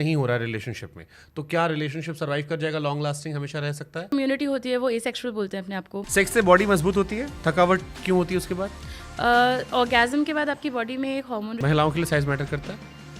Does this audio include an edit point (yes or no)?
yes